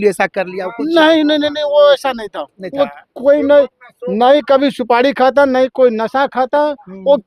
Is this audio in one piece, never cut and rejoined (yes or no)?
yes